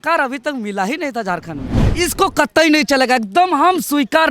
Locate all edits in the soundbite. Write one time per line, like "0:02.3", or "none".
0:01.8